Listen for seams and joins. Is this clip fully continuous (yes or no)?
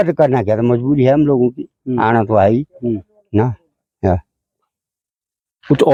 yes